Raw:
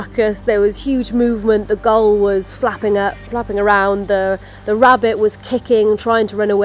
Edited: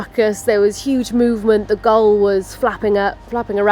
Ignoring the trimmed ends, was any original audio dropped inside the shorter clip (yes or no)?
no